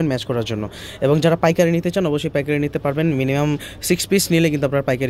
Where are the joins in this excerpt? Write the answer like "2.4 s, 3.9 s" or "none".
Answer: none